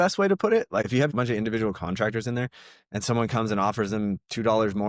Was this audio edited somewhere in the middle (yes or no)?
yes